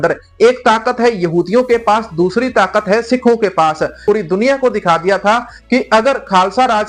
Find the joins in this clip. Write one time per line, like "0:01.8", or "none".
0:04.0